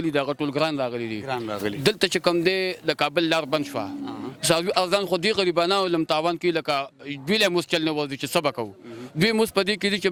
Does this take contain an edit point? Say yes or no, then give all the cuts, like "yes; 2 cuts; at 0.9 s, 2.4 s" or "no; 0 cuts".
no; 0 cuts